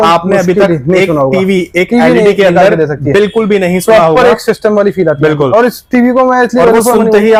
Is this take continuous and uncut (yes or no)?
yes